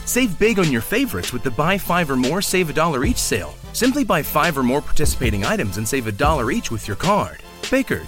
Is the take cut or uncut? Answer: uncut